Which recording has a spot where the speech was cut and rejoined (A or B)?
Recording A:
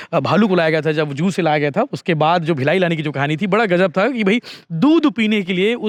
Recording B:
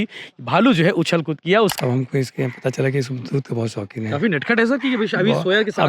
B